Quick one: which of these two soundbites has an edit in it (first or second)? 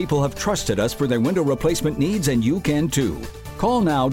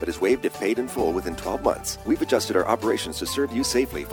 second